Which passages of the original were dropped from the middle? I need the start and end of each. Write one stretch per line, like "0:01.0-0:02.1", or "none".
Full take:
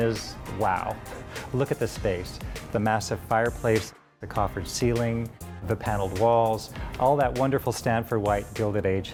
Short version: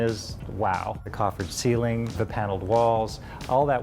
0:01.0-0:04.2
0:05.3-0:05.6